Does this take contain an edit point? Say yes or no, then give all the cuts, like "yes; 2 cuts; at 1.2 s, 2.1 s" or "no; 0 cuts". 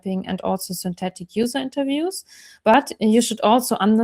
no; 0 cuts